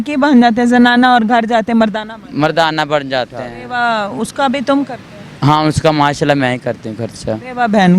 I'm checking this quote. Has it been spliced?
yes; 1 cut; at 3.6 s

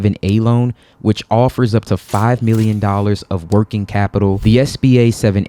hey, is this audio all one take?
no; 1 cut; at 4.4 s

